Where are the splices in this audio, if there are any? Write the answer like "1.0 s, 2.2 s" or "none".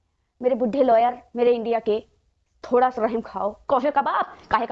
3.6 s